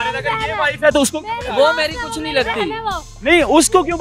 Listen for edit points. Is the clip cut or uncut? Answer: uncut